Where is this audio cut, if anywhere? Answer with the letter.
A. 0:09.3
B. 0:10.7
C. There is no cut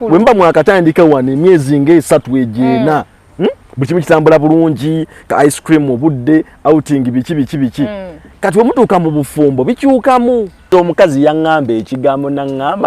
B